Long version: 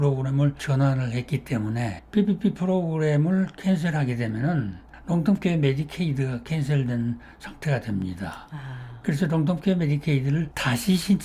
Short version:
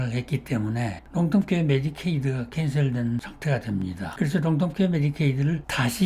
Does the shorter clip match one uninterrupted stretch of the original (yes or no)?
no